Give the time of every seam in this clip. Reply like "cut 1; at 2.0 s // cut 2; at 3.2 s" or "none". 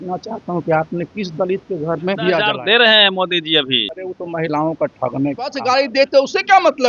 cut 1; at 2.5 s // cut 2; at 4.0 s // cut 3; at 5.6 s